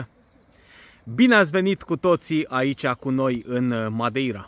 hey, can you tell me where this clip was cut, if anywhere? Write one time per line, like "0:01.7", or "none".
none